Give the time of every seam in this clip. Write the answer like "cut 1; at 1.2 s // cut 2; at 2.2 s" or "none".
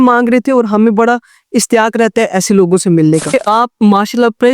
cut 1; at 3.3 s